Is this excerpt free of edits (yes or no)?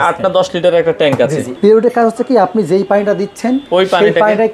no